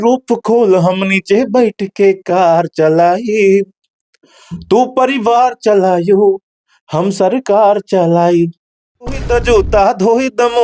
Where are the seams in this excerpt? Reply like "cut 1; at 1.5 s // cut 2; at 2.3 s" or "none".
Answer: cut 1; at 9.2 s